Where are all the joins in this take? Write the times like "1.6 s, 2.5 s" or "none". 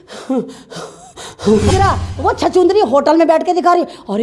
1.7 s